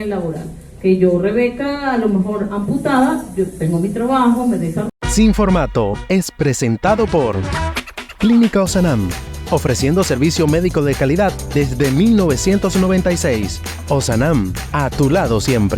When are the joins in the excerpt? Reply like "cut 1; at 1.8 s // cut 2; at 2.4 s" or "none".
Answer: cut 1; at 4.9 s